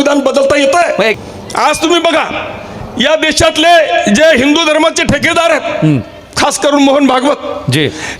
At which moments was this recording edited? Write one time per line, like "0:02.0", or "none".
0:01.2